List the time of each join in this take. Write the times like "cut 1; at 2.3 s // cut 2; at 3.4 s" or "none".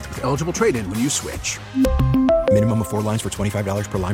none